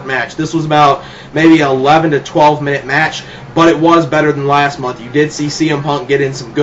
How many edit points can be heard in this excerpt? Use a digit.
1